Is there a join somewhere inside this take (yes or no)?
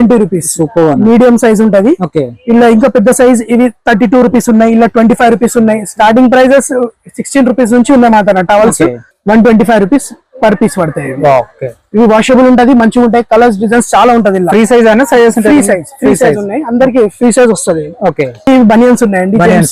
yes